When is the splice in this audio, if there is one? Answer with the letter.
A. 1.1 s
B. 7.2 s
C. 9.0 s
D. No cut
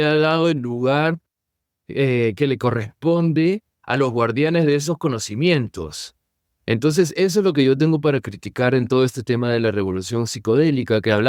D